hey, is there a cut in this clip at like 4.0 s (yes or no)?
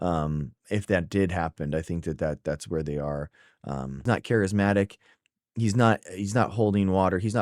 yes